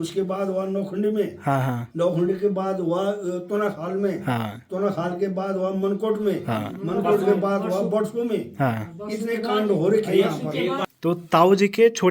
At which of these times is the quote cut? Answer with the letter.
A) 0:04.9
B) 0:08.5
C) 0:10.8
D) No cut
C